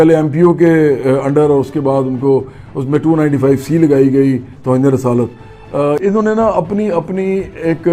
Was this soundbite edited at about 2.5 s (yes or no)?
no